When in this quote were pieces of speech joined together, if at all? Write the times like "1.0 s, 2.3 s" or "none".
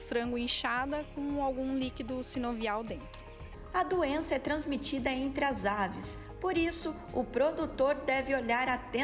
none